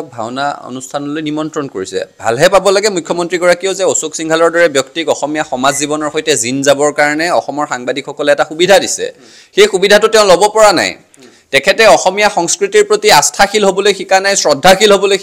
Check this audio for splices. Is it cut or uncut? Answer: uncut